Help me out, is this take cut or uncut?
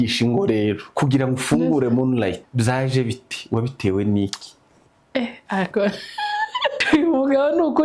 cut